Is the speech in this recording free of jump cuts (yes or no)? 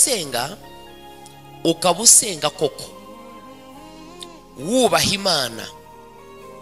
no